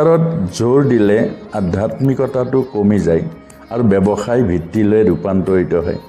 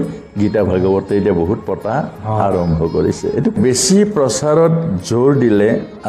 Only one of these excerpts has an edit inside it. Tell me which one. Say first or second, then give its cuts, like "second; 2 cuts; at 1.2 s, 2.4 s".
second; 1 cut; at 3.6 s